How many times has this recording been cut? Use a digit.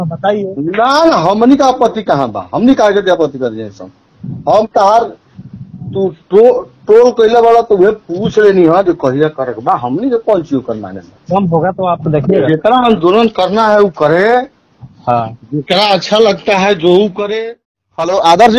1